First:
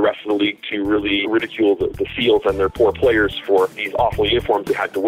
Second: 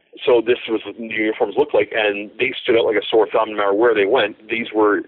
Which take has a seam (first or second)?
first